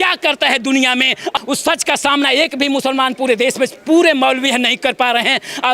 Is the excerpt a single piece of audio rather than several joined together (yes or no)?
no